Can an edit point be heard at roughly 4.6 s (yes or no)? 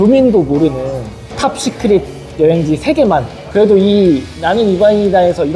no